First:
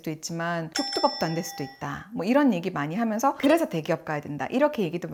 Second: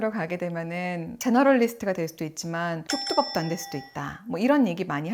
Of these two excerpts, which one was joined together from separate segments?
second; 1 cut; at 1.2 s

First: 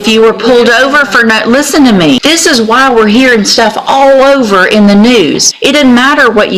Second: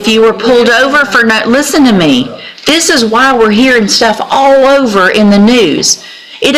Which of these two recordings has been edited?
first; 2 cuts; at 2.2 s, 5.5 s

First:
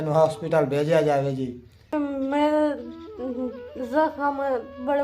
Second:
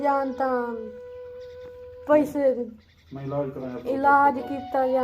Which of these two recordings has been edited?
first; 1 cut; at 1.9 s

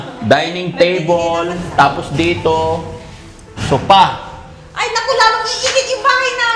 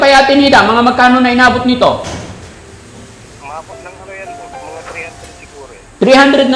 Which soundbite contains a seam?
first; 1 cut; at 1.6 s

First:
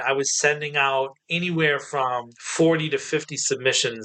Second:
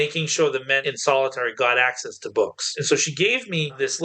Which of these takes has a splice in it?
second; 2 cuts; at 0.8 s, 2.7 s

